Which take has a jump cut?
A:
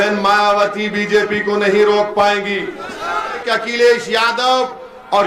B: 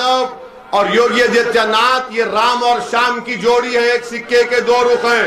A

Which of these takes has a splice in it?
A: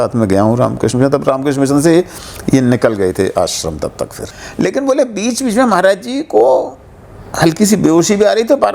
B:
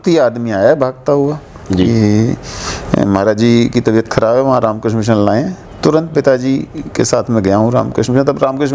A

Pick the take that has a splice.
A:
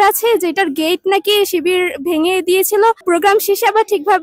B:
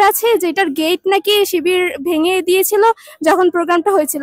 A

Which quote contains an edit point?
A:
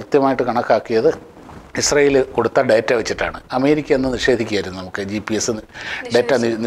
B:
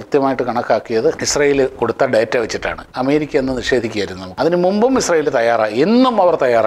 B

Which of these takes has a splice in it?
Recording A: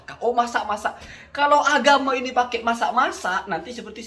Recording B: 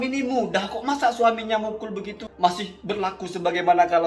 B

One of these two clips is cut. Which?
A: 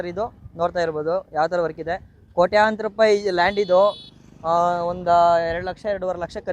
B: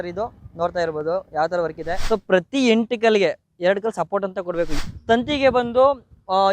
B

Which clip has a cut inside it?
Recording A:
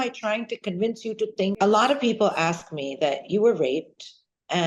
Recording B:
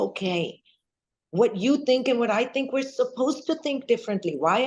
A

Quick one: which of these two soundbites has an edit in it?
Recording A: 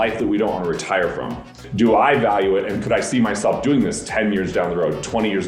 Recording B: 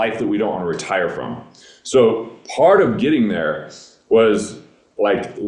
A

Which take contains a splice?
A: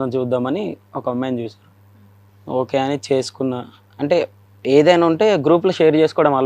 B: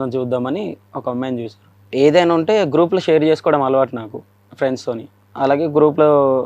B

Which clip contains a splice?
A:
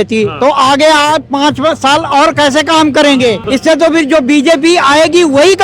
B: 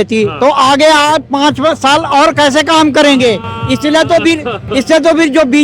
A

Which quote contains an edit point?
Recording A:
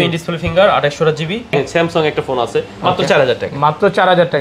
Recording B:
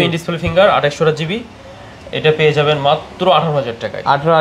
A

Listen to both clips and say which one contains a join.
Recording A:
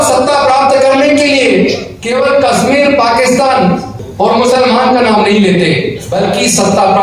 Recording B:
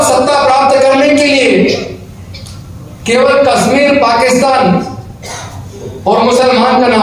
A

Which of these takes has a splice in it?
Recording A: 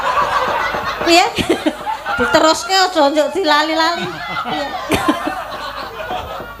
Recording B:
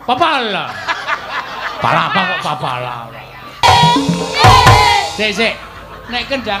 B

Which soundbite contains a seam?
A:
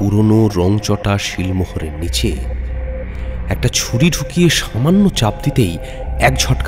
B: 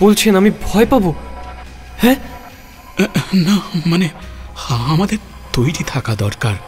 B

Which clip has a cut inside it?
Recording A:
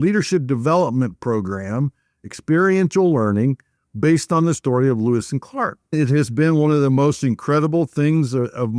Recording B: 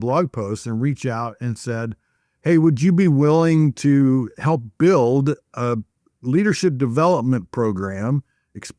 A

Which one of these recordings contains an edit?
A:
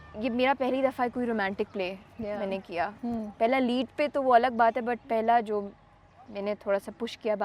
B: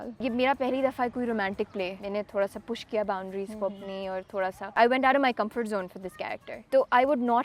B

